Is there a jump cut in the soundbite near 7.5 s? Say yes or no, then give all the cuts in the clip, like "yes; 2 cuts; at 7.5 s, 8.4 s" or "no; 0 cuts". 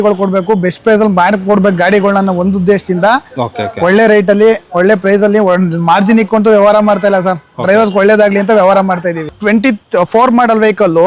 no; 1 cut; at 9.3 s